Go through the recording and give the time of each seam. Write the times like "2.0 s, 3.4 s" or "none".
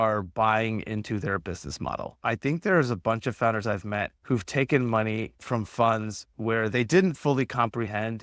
2.1 s